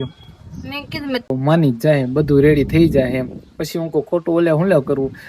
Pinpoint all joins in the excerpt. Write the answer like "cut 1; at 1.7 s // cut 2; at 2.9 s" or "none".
cut 1; at 1.2 s